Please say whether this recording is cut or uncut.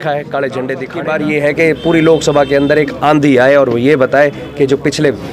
cut